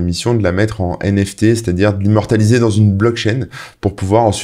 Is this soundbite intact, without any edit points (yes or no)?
yes